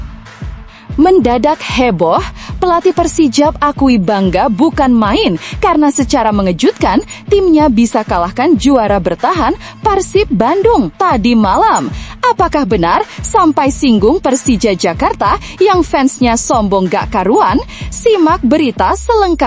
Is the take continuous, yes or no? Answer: no